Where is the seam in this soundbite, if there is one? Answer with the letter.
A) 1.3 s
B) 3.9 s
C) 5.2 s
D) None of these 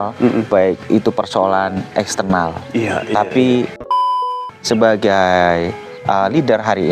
B